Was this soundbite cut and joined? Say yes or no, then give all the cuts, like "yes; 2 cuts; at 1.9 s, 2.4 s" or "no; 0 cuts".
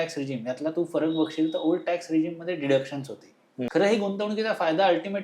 yes; 1 cut; at 3.5 s